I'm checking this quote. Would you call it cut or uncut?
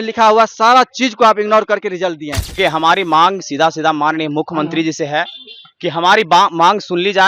cut